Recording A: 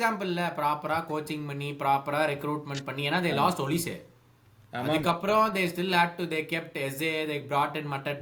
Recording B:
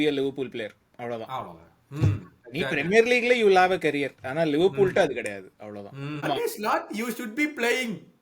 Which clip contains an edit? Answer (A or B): B